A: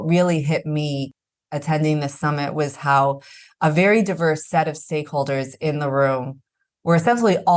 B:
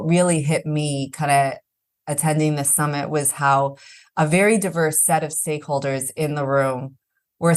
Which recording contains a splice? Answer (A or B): A